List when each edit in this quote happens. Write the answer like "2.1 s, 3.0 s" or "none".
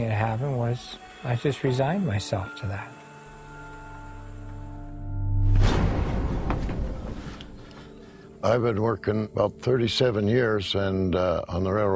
8.2 s